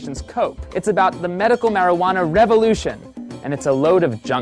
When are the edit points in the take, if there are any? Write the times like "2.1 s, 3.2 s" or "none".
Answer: 3.3 s